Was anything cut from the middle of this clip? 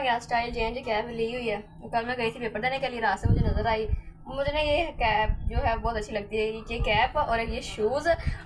no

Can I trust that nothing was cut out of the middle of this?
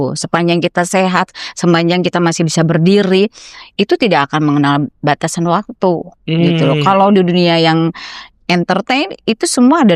yes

